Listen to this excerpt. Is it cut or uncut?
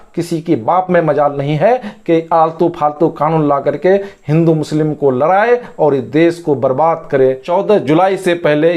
cut